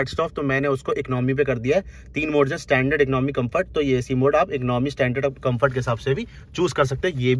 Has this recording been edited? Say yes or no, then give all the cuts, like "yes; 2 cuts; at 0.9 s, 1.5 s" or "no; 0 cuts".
no; 0 cuts